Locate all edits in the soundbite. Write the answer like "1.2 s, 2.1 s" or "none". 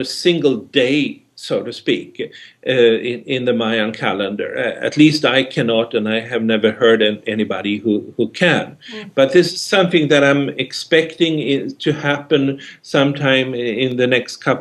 9.8 s